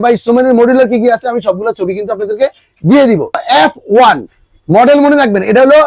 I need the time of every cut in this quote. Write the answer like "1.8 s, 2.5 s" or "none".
3.4 s